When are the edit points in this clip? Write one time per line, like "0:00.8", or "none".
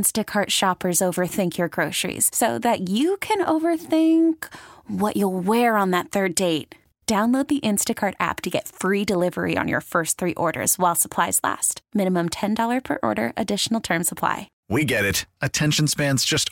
0:14.5